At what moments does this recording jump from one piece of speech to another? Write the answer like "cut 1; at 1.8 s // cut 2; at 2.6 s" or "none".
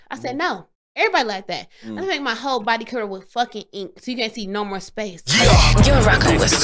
cut 1; at 5.2 s